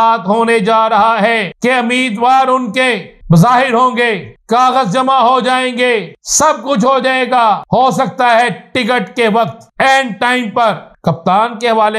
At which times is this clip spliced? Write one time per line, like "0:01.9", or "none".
0:01.5
0:03.1
0:04.3
0:06.2
0:07.6
0:09.6
0:10.9